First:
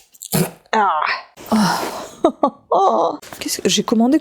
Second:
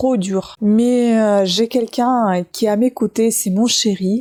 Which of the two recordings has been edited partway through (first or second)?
first